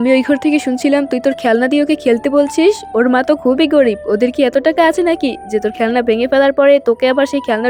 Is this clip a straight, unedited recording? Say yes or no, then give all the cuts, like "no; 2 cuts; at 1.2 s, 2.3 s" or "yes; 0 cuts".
yes; 0 cuts